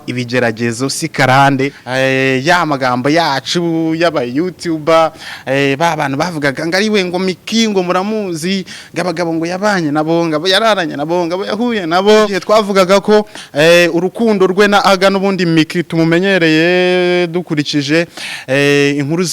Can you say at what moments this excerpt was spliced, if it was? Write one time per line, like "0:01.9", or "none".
0:01.8
0:12.4